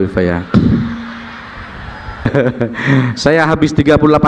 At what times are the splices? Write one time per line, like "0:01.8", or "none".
0:02.2

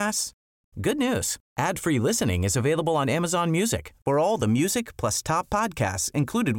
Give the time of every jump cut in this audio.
none

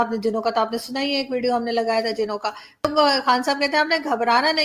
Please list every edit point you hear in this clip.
0:02.9

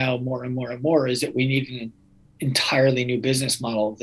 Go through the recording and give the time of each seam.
none

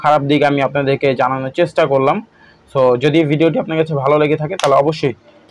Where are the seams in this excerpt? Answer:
none

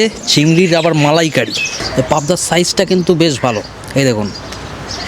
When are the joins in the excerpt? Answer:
0:01.8

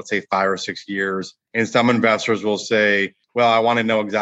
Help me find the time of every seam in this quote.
0:01.4
0:03.2

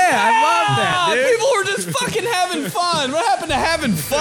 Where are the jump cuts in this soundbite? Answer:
none

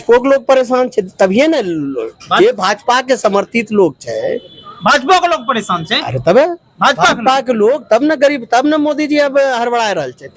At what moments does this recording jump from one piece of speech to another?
none

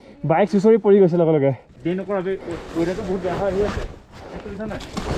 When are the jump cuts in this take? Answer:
0:02.0

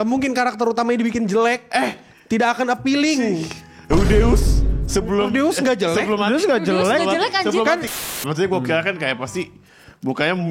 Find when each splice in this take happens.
0:07.9

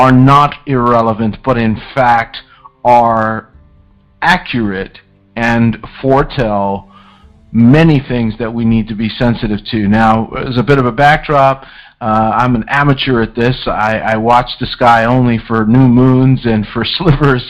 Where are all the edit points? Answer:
none

